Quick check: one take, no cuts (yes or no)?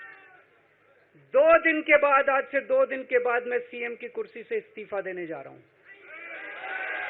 yes